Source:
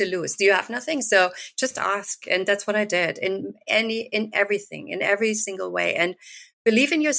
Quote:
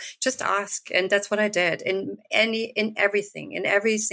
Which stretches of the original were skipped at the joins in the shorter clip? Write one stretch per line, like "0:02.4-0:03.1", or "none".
none